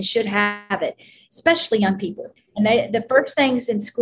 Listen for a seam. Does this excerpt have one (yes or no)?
yes